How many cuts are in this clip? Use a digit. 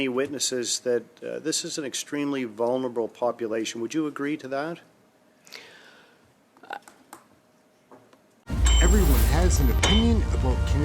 1